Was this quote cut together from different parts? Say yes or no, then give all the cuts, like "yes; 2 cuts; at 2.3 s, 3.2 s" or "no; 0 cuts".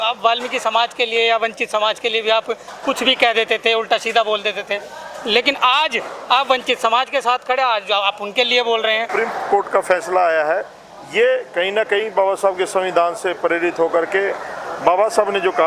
yes; 1 cut; at 9.1 s